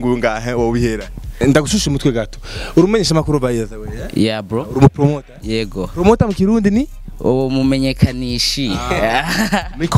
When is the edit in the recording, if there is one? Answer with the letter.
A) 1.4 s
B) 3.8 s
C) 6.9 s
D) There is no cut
A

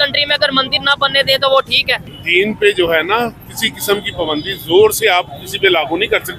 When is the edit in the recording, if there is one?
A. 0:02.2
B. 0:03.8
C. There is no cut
A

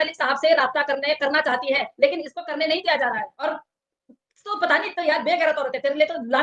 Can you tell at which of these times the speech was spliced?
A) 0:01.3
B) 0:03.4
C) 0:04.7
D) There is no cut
B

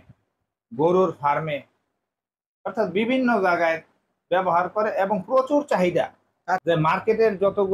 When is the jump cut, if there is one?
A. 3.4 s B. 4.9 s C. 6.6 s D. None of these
C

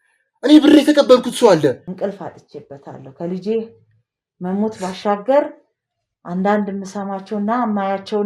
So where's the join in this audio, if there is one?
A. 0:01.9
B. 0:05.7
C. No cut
A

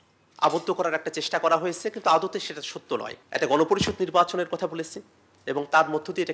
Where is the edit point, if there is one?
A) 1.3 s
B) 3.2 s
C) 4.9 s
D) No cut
B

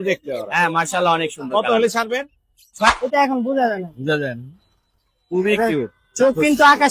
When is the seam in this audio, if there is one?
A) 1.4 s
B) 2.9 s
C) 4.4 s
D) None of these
B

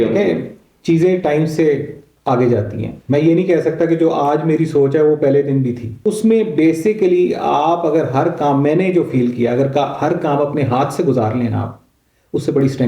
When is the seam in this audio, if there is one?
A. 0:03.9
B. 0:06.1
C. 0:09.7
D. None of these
B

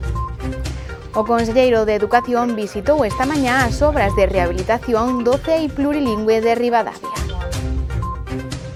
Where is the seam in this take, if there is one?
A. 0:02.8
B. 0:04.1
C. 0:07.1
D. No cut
D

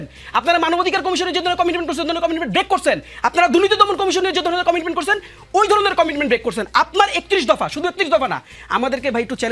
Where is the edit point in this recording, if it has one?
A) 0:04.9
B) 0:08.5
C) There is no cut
B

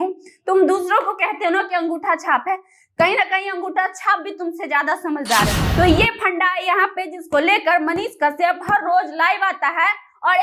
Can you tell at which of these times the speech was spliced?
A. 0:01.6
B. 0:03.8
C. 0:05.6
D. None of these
C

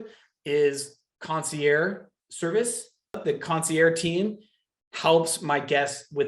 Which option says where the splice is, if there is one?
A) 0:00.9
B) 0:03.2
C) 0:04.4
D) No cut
B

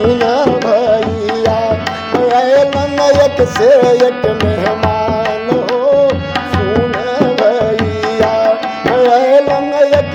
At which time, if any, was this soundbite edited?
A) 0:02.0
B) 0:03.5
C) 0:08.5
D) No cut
D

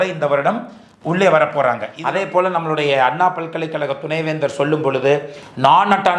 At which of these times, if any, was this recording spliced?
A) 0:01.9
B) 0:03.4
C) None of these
A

